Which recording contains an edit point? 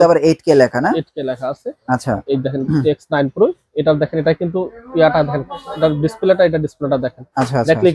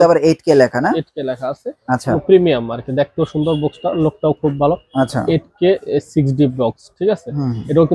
second; 1 cut; at 2.1 s

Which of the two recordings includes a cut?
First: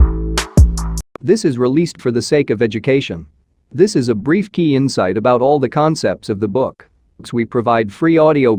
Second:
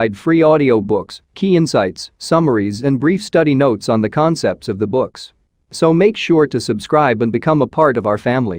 first; 1 cut; at 0.9 s

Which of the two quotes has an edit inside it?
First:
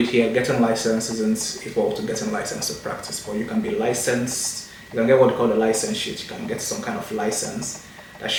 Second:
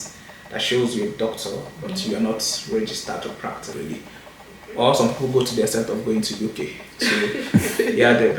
second; 1 cut; at 3.7 s

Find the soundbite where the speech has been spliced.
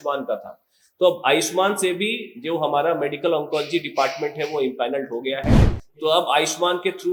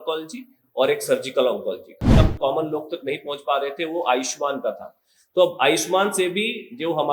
second; 1 cut; at 2.0 s

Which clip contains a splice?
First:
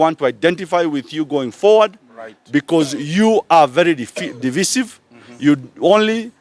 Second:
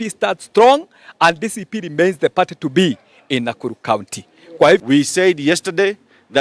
second; 1 cut; at 4.8 s

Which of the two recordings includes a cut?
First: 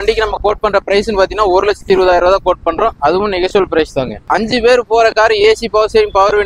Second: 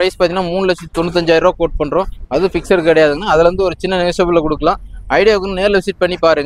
first; 1 cut; at 4.2 s

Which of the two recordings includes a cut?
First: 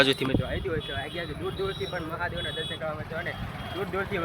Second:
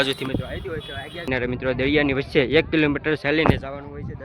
second; 1 cut; at 1.2 s

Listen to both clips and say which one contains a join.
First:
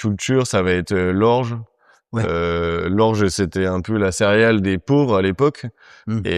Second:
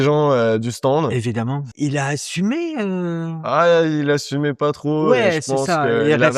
second; 1 cut; at 1.6 s

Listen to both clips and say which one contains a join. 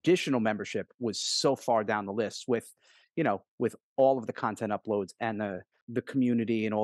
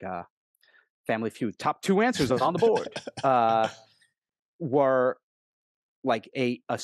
first; 1 cut; at 5.8 s

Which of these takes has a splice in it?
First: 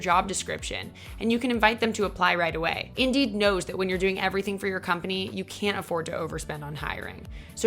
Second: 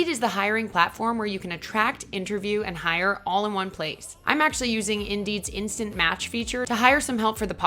first; 1 cut; at 2.8 s

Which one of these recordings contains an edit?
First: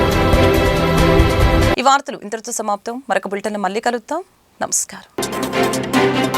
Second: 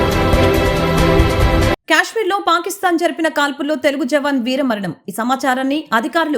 second; 1 cut; at 1.7 s

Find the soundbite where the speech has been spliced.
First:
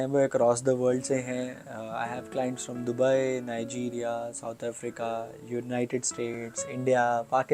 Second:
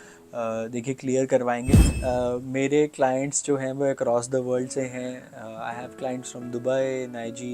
second; 1 cut; at 2.0 s

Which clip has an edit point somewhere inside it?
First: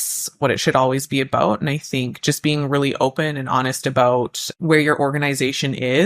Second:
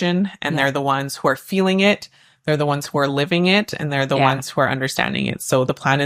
first; 1 cut; at 4.4 s

